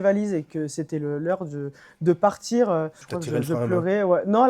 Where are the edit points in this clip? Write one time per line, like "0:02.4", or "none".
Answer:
0:03.1